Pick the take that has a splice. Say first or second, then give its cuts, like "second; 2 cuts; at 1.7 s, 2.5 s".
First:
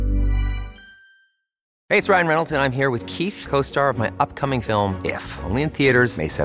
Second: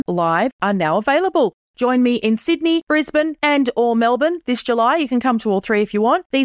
first; 1 cut; at 1.7 s